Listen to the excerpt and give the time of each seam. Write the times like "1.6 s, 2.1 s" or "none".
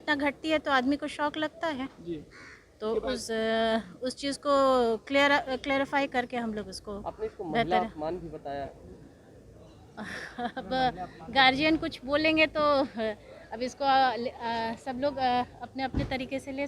none

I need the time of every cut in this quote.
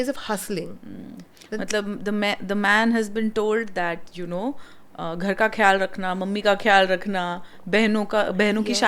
none

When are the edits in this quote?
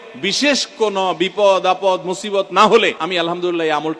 3.0 s

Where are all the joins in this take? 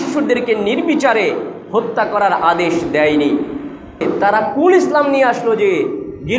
4.0 s

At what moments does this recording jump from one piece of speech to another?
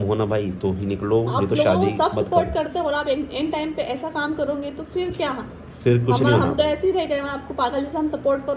none

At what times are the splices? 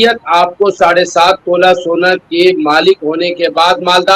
none

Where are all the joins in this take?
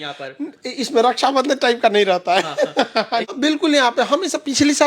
3.3 s

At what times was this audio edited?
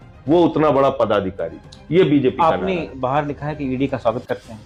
none

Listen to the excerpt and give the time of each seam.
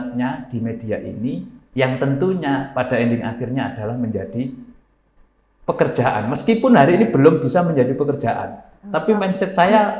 none

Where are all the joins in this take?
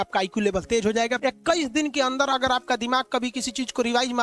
1.2 s

